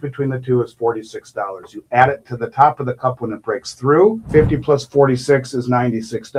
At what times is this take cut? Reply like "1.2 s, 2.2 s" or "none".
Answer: none